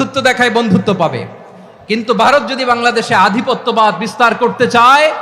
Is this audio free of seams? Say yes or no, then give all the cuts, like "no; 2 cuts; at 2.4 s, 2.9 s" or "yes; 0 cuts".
yes; 0 cuts